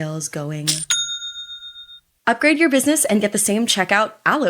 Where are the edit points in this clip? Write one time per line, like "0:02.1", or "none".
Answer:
0:02.1